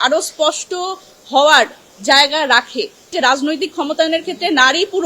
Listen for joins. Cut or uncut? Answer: cut